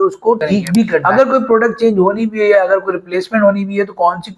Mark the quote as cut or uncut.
cut